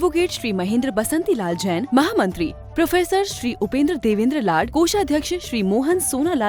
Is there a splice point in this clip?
no; 0 cuts

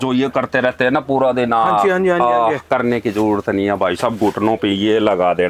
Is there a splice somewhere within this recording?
no; 0 cuts

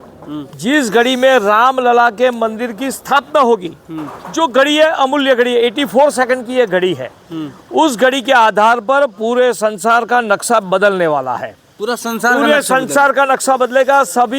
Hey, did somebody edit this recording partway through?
no; 0 cuts

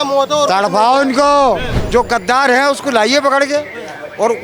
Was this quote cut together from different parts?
yes; 1 cut; at 1.7 s

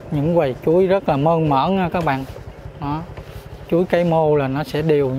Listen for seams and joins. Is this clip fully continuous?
yes; 0 cuts

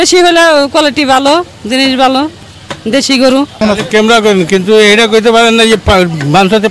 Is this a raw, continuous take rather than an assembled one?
no; 1 cut; at 3.6 s

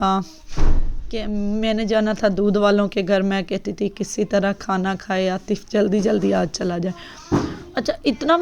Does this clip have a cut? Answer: no; 0 cuts

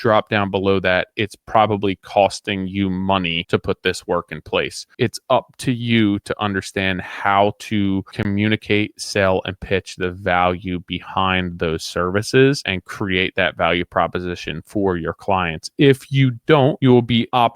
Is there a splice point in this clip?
yes; 2 cuts; at 3.4 s, 4.8 s

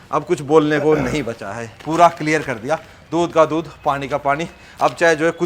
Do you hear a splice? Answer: no; 0 cuts

